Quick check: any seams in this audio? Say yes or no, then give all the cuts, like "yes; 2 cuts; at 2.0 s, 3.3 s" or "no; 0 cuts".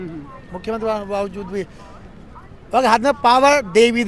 no; 0 cuts